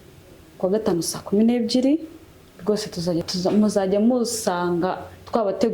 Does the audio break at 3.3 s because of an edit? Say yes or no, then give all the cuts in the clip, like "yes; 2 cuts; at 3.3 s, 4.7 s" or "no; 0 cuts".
yes; 1 cut; at 3.3 s